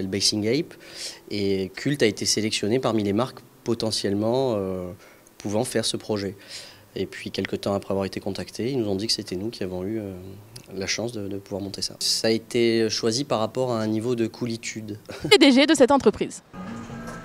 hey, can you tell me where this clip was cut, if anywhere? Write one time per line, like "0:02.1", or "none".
none